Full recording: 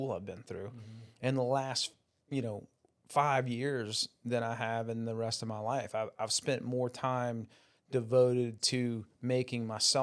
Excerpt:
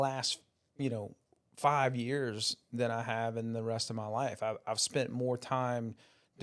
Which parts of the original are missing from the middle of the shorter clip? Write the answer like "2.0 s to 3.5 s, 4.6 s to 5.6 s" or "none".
none